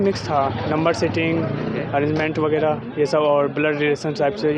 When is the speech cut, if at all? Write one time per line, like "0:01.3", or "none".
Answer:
none